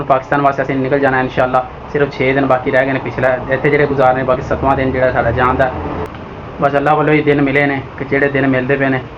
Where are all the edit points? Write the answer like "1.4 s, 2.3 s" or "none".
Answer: 6.1 s